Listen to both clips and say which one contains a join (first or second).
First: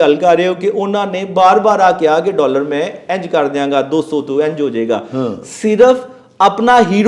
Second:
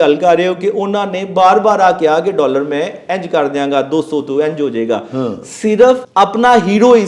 second